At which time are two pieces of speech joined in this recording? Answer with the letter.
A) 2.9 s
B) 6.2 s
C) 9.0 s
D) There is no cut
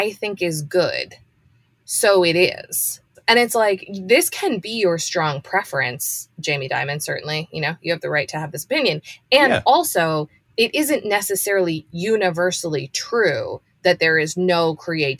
A